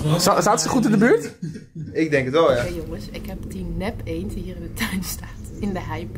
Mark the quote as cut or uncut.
cut